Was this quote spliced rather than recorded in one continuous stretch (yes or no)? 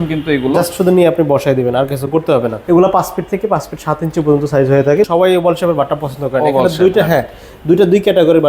yes